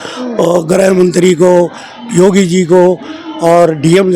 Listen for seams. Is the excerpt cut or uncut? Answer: uncut